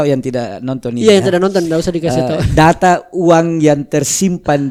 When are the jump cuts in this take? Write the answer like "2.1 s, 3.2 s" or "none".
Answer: none